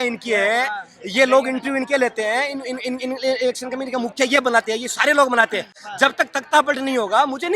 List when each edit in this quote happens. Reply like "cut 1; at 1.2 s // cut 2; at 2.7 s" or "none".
none